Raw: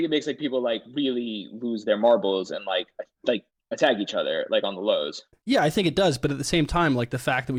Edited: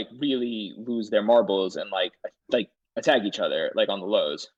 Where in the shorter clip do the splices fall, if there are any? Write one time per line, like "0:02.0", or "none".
none